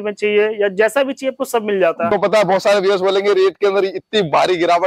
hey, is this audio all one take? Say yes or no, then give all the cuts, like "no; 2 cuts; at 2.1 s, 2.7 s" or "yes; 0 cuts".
no; 1 cut; at 2.1 s